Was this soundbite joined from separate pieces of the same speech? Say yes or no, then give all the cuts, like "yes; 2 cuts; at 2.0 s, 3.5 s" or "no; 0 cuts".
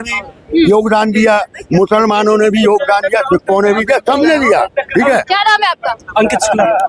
no; 0 cuts